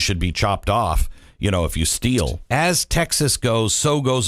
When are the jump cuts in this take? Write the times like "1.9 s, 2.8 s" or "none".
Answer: 2.4 s